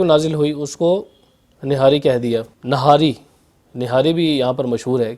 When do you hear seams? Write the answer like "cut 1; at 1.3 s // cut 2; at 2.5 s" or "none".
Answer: cut 1; at 2.5 s